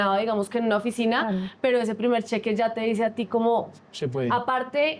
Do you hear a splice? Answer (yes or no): no